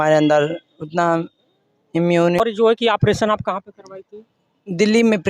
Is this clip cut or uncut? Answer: cut